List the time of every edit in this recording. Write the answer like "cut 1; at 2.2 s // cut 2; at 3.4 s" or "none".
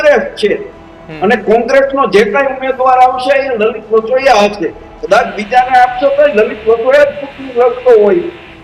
none